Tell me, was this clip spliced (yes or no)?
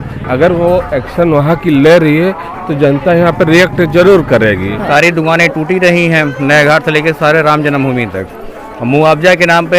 yes